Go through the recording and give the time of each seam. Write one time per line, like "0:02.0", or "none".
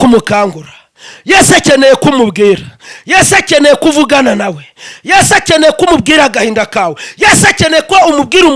none